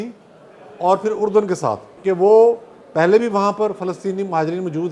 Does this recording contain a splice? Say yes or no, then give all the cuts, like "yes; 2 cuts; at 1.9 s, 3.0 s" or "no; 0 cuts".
yes; 1 cut; at 1.9 s